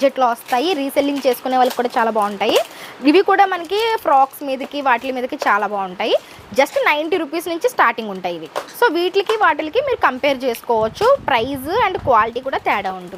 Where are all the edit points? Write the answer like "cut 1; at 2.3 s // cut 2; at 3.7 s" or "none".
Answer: none

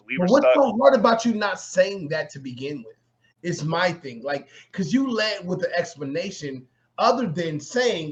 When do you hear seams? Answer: none

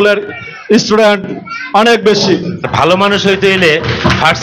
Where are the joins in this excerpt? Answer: cut 1; at 2.7 s

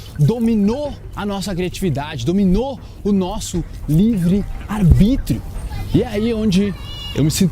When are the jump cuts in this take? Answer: cut 1; at 1.1 s // cut 2; at 4.6 s

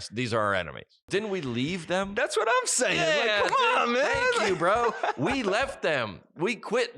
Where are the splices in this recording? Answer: cut 1; at 1.1 s

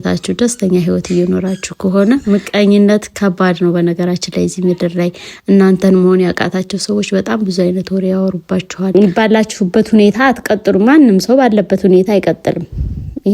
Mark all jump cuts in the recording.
cut 1; at 2.2 s // cut 2; at 8.9 s

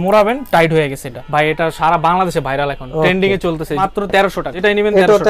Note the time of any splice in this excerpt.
cut 1; at 1.1 s // cut 2; at 4.1 s

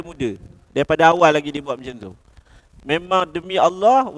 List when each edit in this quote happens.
none

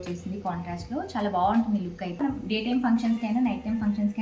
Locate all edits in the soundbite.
cut 1; at 2.2 s

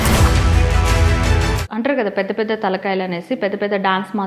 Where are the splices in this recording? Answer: cut 1; at 1.6 s

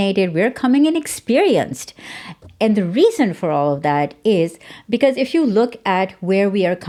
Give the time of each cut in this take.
none

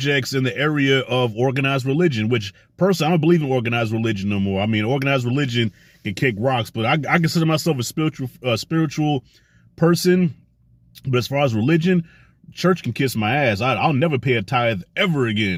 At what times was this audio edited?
none

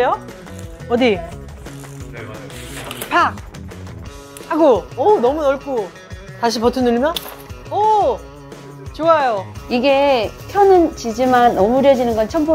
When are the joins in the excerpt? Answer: none

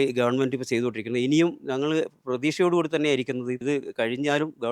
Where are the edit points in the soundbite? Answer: cut 1; at 3.6 s

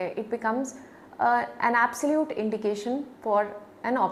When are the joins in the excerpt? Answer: none

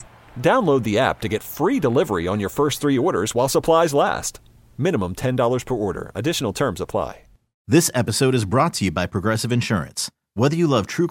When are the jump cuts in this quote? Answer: none

